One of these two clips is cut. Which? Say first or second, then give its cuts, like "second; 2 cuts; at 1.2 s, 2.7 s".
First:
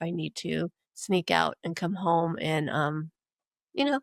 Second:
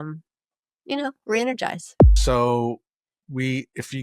second; 1 cut; at 2.2 s